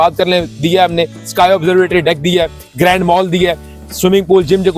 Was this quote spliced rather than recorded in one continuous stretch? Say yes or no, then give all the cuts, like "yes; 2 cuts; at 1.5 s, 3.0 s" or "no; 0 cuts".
no; 0 cuts